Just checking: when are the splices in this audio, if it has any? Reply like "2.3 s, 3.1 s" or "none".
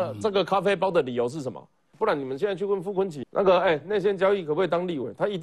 1.9 s